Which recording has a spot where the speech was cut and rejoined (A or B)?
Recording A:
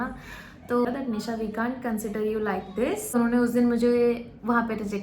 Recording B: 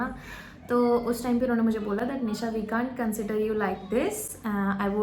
A